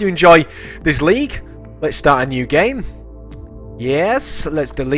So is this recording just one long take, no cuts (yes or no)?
no